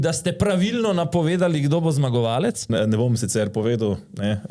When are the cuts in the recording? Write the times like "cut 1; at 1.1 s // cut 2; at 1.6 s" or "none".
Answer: cut 1; at 2.7 s